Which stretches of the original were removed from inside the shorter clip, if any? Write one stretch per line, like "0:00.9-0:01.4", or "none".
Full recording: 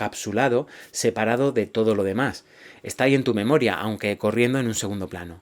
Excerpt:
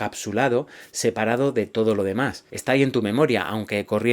0:02.5-0:02.8